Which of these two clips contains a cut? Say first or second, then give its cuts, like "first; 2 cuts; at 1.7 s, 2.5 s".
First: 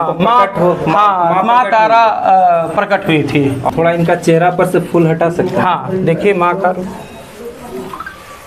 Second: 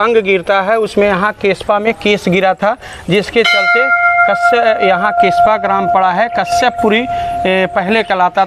first; 1 cut; at 3.6 s